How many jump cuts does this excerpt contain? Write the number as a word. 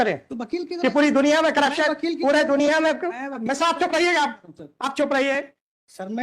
zero